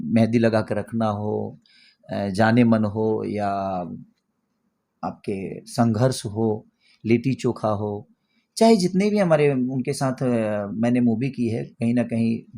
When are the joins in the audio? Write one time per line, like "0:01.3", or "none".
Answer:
none